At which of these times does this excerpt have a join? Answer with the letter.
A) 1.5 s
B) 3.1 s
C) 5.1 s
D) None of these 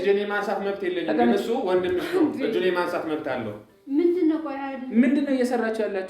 D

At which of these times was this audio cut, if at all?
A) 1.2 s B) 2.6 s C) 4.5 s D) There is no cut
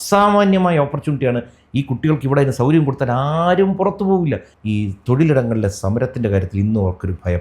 C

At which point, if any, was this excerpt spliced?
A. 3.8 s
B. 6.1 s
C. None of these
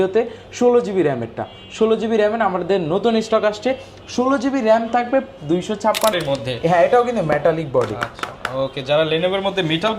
B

